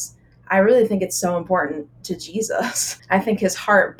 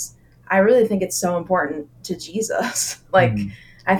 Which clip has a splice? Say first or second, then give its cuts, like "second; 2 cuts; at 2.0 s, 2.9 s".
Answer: first; 1 cut; at 2.9 s